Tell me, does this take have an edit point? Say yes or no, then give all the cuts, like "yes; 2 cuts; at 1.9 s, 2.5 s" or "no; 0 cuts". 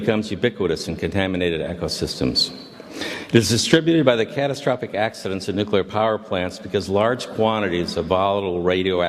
no; 0 cuts